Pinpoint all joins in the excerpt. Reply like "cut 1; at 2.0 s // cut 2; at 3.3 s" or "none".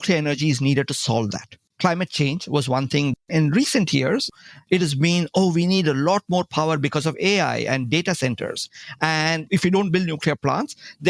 cut 1; at 1.6 s // cut 2; at 3.1 s // cut 3; at 4.3 s